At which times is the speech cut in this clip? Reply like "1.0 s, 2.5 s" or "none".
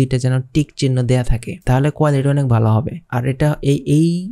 none